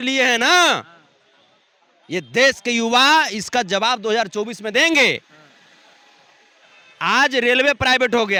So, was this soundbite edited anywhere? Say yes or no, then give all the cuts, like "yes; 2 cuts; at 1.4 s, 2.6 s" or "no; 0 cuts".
no; 0 cuts